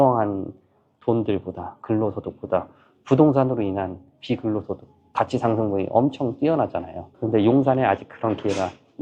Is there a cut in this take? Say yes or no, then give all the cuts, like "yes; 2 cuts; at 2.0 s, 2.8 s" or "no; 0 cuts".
yes; 1 cut; at 7.0 s